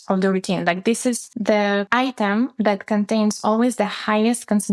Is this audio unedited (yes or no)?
no